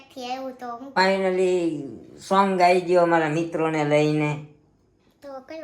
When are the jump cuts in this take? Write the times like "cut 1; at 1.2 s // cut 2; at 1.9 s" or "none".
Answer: cut 1; at 1.0 s